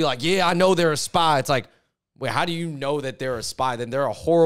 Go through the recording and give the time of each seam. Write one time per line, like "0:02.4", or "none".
none